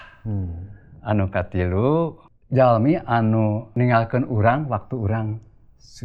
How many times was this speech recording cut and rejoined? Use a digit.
1